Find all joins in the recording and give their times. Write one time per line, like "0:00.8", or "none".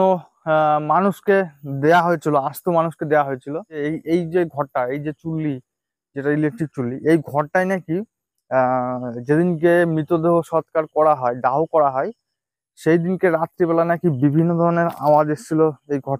0:03.8